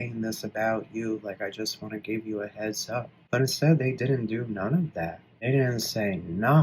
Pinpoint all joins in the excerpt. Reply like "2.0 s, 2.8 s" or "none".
3.2 s, 5.3 s